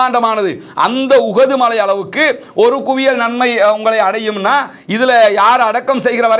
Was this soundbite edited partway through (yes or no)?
no